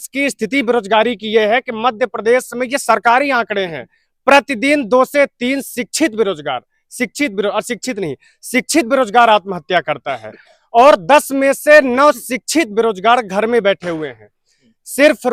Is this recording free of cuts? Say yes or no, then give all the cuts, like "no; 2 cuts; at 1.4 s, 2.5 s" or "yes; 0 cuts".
yes; 0 cuts